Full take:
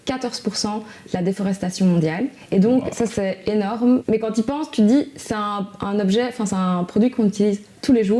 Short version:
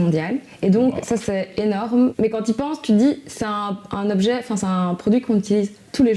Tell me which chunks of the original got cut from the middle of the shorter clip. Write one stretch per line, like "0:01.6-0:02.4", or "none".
none